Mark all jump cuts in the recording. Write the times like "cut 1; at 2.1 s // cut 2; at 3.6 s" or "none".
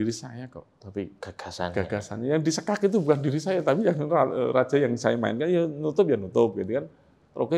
none